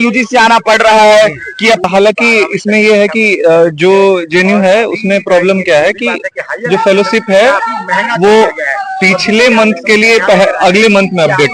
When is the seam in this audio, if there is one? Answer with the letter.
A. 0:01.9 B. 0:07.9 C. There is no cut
A